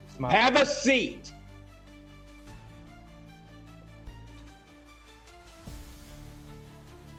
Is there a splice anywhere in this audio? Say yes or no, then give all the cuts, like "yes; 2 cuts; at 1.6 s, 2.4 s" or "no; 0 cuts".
no; 0 cuts